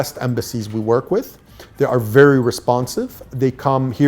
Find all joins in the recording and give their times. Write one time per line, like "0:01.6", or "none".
none